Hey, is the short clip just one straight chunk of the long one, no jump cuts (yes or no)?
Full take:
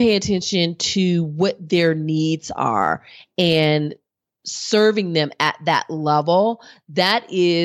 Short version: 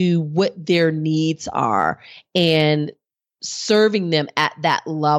yes